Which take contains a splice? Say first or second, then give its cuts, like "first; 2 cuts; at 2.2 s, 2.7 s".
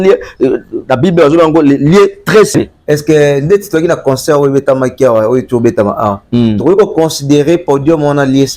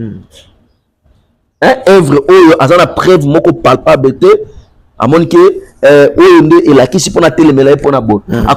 first; 1 cut; at 2.5 s